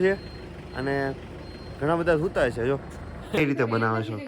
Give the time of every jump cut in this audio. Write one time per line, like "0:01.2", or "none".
0:03.3